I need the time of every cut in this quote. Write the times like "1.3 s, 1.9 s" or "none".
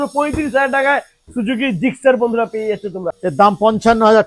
3.2 s

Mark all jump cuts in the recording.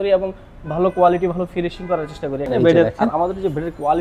2.4 s

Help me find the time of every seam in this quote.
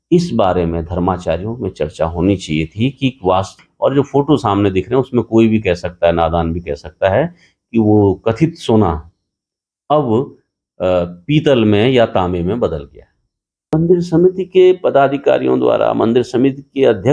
3.5 s, 13.7 s

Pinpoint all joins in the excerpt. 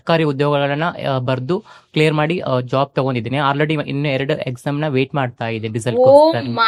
none

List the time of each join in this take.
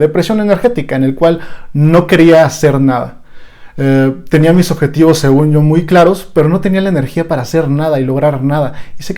none

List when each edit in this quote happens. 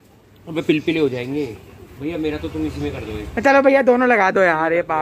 none

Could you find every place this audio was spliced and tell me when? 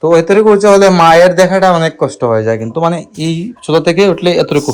none

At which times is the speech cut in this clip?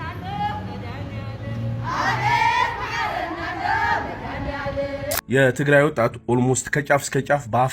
5.2 s

